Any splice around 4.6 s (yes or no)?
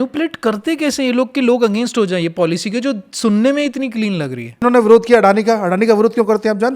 yes